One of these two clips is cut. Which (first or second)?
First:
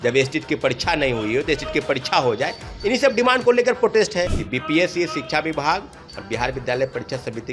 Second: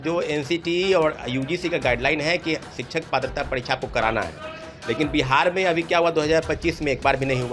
first